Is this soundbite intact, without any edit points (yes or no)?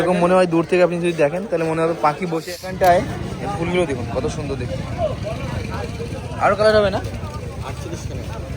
no